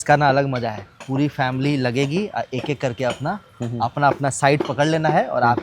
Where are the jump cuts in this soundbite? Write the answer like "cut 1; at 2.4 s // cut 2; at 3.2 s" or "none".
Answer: cut 1; at 0.9 s